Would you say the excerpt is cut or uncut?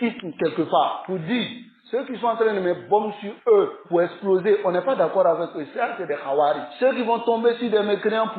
uncut